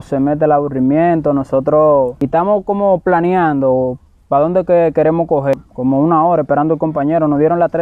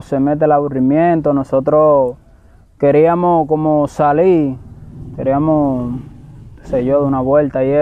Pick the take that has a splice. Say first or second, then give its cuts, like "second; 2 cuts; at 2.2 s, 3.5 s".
first; 2 cuts; at 2.2 s, 5.5 s